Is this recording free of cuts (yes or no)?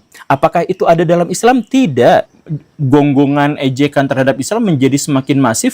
no